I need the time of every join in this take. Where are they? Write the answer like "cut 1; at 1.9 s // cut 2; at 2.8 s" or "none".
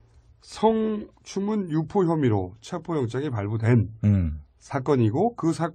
cut 1; at 1.4 s